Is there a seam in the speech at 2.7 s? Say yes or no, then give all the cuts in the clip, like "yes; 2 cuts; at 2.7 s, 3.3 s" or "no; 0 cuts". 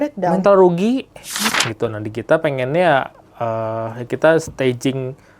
no; 1 cut; at 1.4 s